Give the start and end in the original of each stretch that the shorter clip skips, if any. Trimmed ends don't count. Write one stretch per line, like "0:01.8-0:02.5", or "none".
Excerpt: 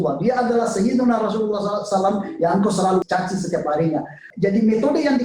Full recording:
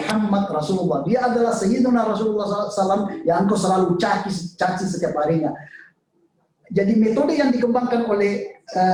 0:03.9-0:04.5
0:05.7-0:06.5